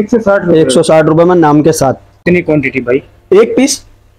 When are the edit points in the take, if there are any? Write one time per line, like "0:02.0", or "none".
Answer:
0:02.2